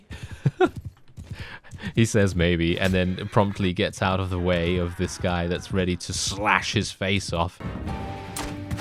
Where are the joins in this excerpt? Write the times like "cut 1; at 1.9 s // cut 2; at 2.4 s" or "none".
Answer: cut 1; at 7.6 s